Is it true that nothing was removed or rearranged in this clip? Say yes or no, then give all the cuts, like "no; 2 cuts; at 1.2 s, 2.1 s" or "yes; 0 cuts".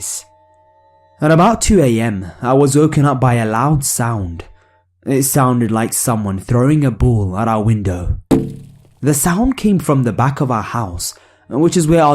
yes; 0 cuts